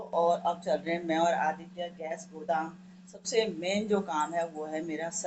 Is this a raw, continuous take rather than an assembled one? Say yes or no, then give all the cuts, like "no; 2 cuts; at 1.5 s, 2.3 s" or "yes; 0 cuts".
yes; 0 cuts